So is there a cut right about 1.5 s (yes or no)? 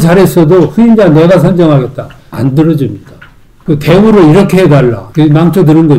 no